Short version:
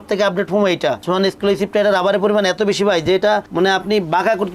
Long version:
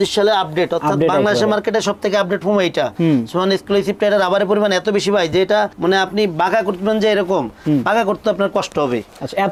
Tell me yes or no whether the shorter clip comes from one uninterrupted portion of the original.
no